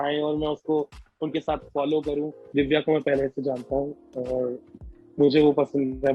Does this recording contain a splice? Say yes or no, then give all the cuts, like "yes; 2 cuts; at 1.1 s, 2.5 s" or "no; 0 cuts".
yes; 1 cut; at 2.4 s